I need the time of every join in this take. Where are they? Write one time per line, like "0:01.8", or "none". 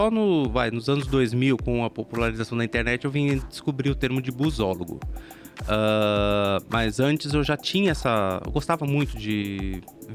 none

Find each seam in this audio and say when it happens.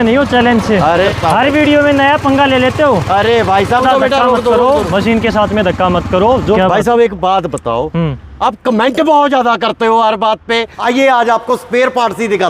0:01.1
0:03.8
0:06.6
0:08.2
0:10.7

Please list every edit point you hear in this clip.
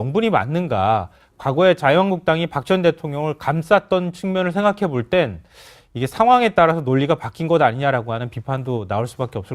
0:04.3

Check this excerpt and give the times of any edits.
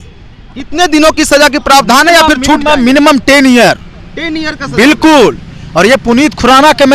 none

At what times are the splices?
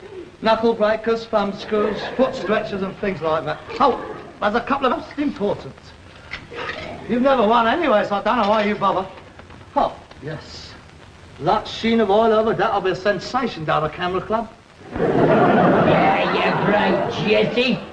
none

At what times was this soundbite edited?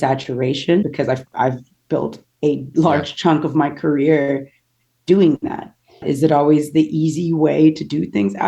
0:00.8
0:06.0

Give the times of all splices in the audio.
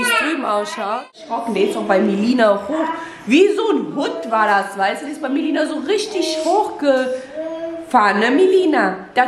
0:01.2

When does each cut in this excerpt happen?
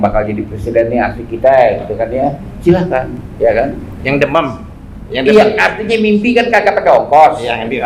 none

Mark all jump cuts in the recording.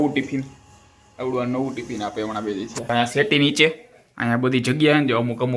0:02.9

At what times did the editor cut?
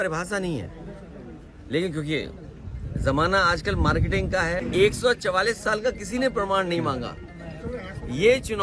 0:04.6

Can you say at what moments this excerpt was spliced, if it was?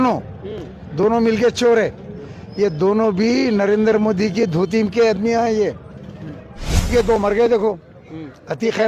0:06.8

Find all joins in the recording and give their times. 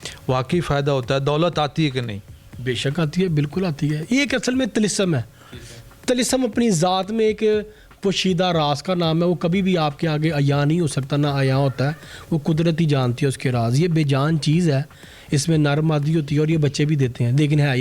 none

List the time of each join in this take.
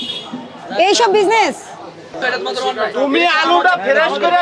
0:02.2

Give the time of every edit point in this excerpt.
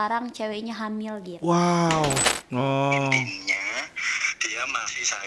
0:02.3

